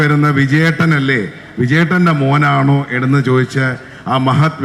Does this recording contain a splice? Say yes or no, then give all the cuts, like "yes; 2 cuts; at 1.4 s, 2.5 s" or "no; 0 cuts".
no; 0 cuts